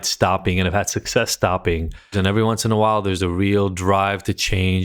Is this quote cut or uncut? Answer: cut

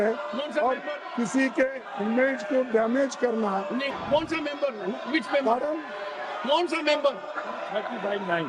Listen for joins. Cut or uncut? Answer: cut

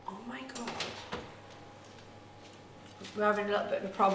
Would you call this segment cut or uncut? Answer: cut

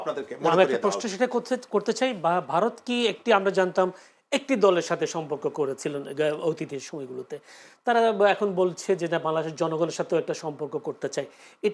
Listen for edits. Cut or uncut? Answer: uncut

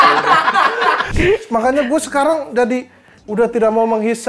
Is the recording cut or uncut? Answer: cut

